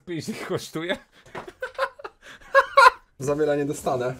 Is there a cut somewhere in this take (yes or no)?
yes